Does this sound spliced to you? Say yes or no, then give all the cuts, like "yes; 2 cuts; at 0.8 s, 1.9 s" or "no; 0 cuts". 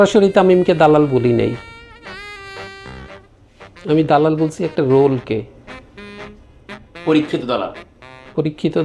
no; 0 cuts